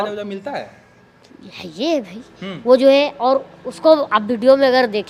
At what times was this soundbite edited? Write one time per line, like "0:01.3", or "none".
none